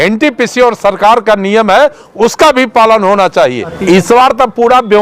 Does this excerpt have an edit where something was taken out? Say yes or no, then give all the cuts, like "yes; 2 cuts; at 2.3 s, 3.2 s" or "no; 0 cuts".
yes; 1 cut; at 3.7 s